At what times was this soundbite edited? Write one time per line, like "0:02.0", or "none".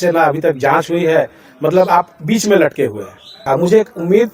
0:03.4